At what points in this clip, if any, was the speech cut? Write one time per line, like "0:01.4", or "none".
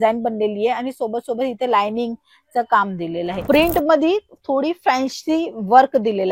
0:03.3

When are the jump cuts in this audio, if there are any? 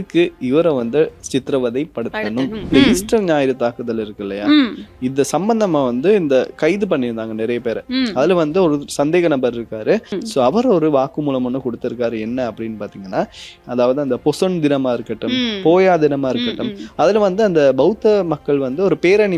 0:02.7
0:10.1
0:13.6

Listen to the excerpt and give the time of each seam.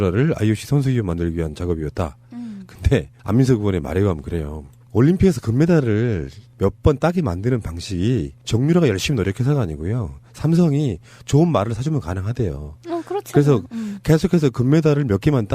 0:06.8

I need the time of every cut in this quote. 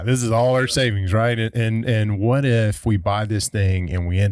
none

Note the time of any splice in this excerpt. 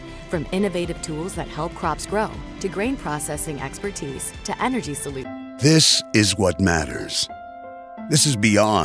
0:05.3

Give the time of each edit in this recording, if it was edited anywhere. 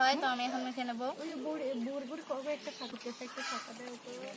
0:02.9

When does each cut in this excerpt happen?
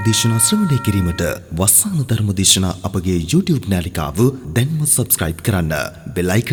none

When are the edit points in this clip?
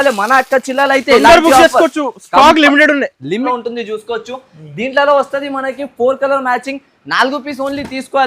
0:03.5

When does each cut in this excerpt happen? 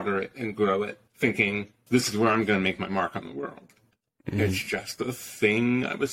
0:01.0
0:01.8

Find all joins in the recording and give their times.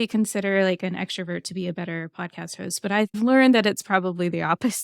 0:03.2

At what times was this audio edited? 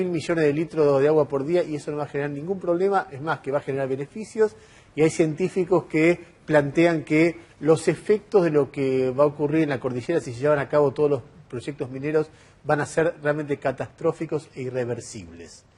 none

